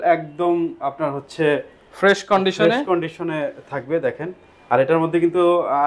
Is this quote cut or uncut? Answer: uncut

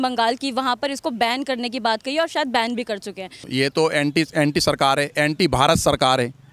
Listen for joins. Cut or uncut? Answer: cut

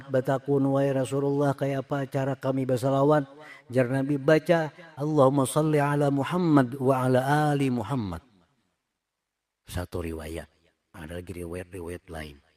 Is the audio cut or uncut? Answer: uncut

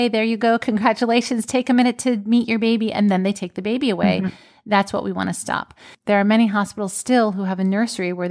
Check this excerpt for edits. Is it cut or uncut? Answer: uncut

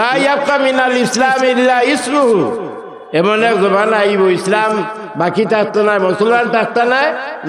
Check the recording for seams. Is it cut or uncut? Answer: uncut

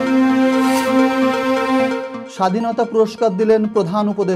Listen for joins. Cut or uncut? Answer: cut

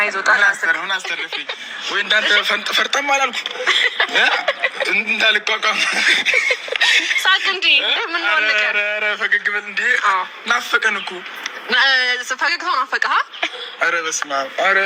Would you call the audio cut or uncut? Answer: uncut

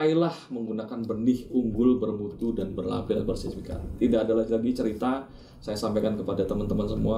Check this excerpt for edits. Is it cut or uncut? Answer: uncut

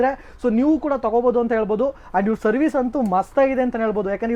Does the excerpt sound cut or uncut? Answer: uncut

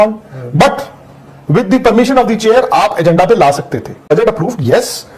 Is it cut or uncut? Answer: cut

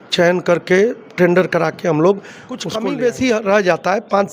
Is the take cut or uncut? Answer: cut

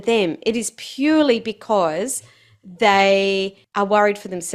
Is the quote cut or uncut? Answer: cut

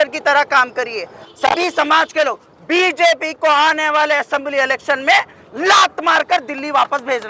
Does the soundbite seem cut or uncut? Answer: cut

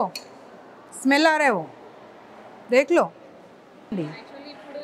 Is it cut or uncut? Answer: cut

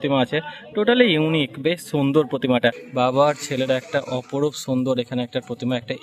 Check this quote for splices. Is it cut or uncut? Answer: cut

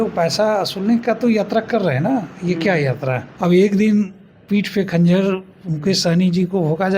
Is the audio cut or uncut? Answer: cut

